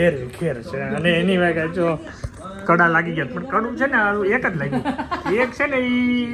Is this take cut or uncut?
uncut